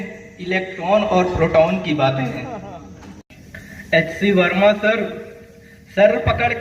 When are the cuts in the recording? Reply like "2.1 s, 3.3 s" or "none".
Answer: 3.2 s